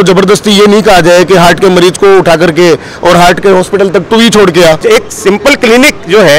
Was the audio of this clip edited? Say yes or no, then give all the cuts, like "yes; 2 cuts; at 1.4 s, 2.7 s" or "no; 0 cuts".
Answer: yes; 1 cut; at 4.8 s